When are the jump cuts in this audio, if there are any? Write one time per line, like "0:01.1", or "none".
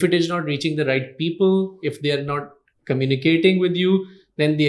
none